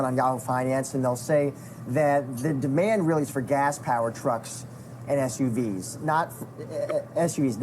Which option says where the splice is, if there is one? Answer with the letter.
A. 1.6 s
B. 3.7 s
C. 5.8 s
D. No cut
D